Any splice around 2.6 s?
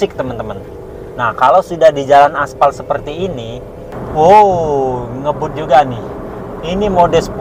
no; 1 cut; at 3.9 s

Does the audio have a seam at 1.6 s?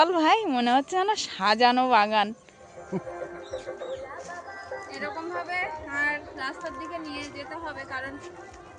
no; 1 cut; at 3.0 s

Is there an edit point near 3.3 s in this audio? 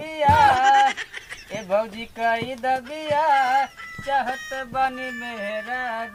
no; 0 cuts

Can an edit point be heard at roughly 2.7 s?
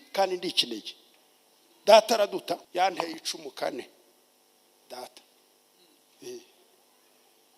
yes; 1 cut; at 2.7 s

